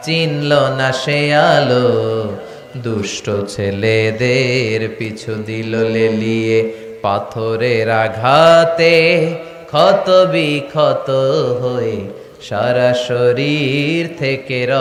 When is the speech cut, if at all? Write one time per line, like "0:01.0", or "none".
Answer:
none